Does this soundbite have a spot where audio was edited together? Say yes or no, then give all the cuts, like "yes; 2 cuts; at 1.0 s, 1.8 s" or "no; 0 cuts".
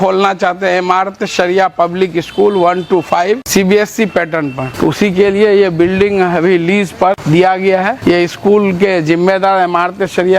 yes; 4 cuts; at 3.4 s, 4.6 s, 7.2 s, 7.9 s